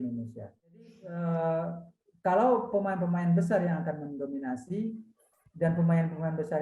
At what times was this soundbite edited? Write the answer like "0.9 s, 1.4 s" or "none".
1.0 s